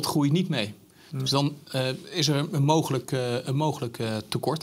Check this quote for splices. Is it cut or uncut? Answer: uncut